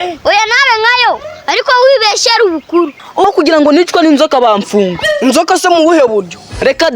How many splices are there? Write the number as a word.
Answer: one